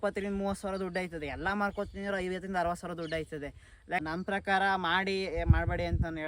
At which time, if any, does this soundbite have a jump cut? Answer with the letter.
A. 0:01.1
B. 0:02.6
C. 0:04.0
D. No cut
C